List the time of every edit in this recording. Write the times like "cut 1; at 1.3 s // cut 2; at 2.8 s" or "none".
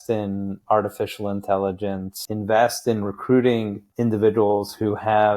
cut 1; at 2.2 s // cut 2; at 3.9 s

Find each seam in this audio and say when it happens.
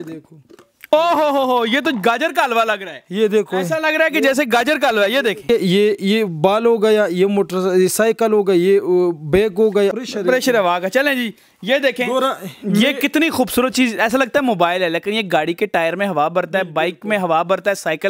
cut 1; at 5.5 s // cut 2; at 9.9 s

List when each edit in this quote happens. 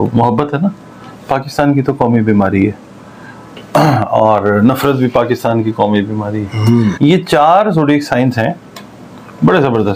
cut 1; at 7.0 s

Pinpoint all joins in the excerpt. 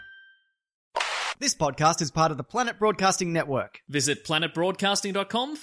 cut 1; at 1.0 s

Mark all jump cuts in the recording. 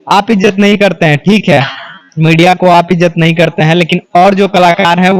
none

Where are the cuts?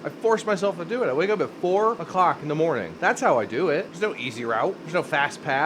cut 1; at 2.0 s // cut 2; at 2.9 s // cut 3; at 3.9 s // cut 4; at 4.8 s

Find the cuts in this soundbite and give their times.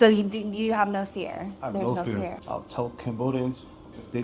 cut 1; at 2.4 s

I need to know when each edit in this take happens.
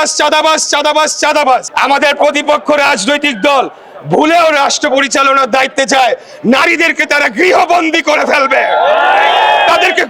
cut 1; at 1.7 s

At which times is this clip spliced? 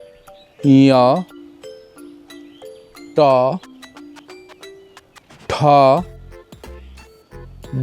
cut 1; at 1.6 s // cut 2; at 3.1 s // cut 3; at 4.0 s // cut 4; at 5.4 s

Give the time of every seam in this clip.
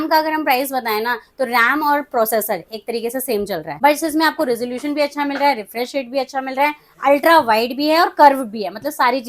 cut 1; at 3.7 s

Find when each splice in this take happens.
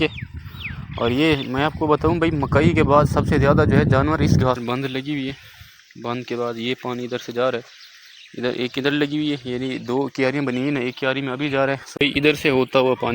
cut 1; at 4.6 s // cut 2; at 12.0 s

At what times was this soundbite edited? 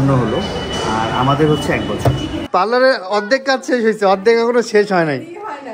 cut 1; at 2.4 s

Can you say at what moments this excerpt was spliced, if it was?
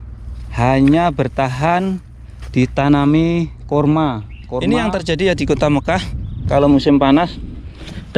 cut 1; at 4.6 s

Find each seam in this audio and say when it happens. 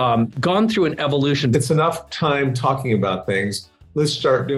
cut 1; at 1.5 s

